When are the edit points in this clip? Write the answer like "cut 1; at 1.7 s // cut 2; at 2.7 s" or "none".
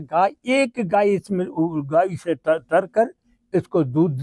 none